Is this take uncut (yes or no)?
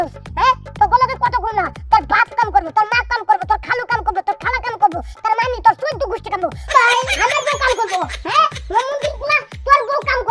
no